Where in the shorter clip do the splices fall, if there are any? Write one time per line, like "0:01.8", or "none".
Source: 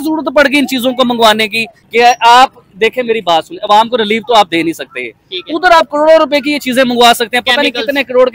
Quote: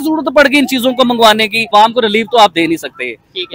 0:01.6